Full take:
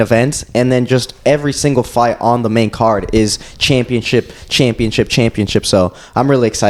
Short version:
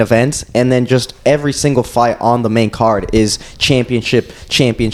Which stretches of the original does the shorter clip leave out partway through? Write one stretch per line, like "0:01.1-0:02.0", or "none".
none